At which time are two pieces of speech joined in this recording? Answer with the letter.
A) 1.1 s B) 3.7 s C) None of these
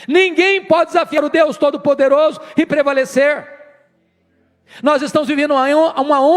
A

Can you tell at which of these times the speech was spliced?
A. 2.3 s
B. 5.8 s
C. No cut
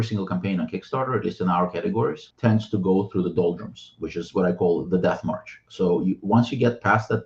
A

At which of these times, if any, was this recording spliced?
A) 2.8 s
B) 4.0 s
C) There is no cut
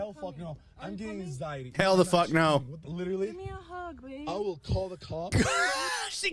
A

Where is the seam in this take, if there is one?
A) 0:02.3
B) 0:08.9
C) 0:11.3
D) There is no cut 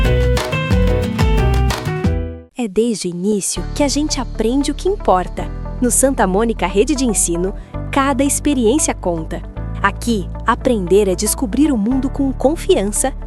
A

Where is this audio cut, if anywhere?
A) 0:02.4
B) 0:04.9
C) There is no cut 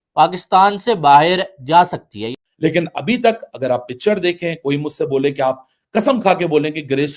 A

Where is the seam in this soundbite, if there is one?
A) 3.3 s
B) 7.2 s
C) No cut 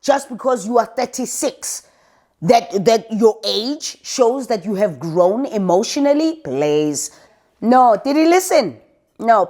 B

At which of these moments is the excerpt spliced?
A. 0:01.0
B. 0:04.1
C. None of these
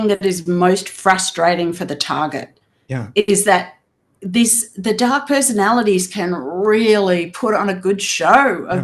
C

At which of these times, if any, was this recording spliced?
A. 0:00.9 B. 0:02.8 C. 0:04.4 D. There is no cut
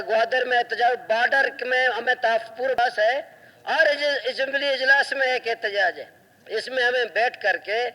B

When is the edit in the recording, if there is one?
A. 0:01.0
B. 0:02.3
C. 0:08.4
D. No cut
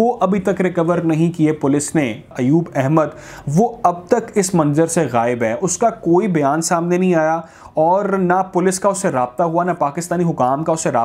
B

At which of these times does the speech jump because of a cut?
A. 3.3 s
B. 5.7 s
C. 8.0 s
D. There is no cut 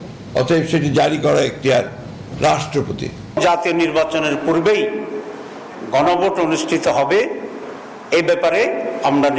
A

